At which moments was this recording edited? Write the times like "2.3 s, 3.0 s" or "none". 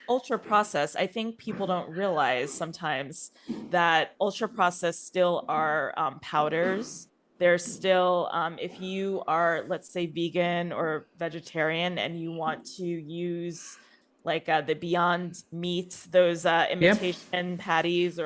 none